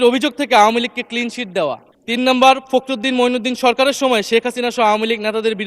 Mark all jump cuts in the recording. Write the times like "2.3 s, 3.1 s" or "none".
1.9 s